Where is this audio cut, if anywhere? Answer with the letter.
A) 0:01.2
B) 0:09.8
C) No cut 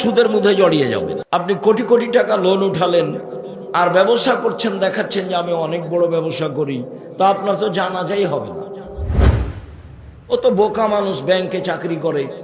A